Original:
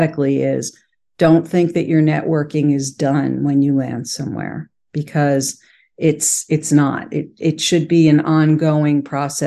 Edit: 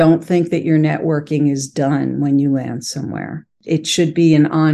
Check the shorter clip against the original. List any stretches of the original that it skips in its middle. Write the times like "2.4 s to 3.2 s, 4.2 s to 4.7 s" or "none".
4.7 s to 7.2 s